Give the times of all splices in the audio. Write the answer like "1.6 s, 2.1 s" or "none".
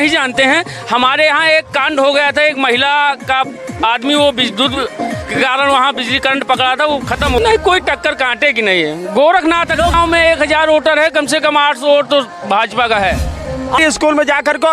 7.4 s, 9.9 s, 13.8 s